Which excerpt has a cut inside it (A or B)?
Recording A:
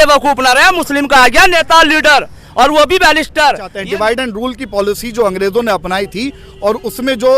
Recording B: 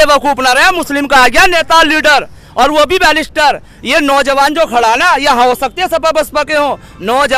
A